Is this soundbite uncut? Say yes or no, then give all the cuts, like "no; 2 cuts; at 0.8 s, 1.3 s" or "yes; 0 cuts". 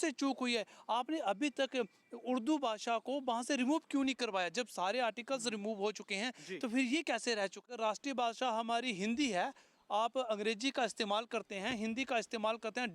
no; 1 cut; at 7.7 s